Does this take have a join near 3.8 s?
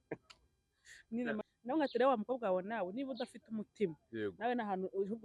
no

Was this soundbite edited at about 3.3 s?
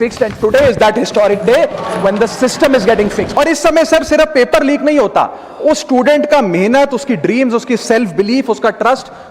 yes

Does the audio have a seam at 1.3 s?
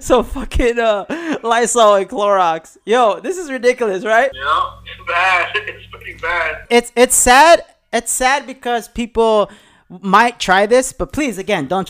no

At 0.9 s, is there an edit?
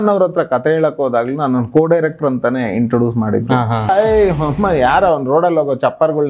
no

